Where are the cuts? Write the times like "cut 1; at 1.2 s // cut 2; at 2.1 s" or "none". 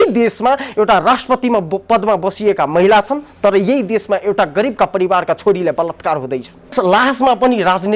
cut 1; at 6.7 s